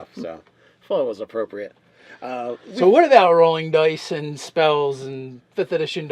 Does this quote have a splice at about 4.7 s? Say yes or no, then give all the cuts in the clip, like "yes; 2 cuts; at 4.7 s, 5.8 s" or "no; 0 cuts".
yes; 1 cut; at 4.7 s